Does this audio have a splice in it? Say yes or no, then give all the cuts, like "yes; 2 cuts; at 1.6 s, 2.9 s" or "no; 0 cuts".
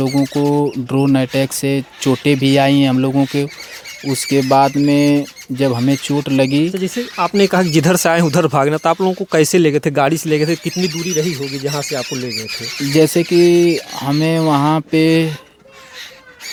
no; 0 cuts